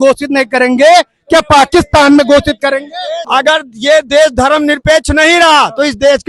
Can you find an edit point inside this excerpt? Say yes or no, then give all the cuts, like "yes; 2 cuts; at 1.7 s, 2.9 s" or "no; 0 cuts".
yes; 1 cut; at 3.1 s